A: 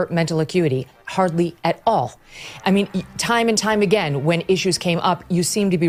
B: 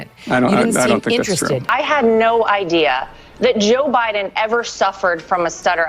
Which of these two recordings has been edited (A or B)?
B